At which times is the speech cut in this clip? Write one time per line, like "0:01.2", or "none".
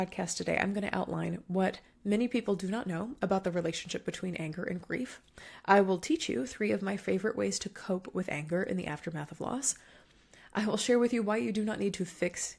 none